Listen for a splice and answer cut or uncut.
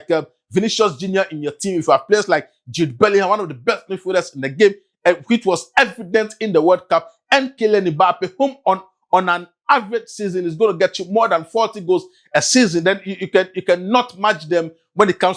uncut